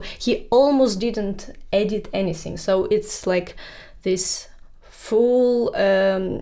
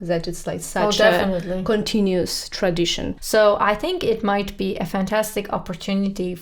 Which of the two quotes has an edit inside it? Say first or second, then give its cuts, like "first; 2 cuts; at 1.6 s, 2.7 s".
second; 1 cut; at 3.1 s